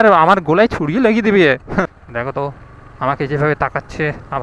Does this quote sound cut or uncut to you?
cut